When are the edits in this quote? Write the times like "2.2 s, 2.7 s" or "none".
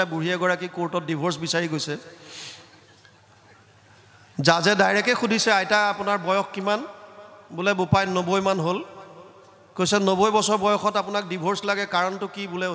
none